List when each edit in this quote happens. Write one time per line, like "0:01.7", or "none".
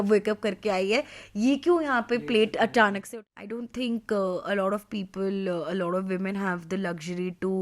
0:03.0